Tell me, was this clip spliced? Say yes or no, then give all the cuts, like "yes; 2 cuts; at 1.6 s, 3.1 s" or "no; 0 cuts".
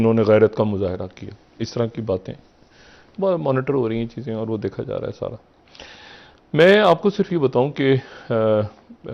no; 0 cuts